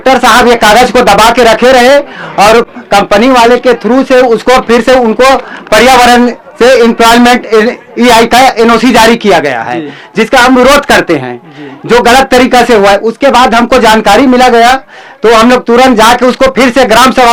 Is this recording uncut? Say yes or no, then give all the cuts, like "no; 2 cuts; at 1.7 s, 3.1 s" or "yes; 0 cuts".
yes; 0 cuts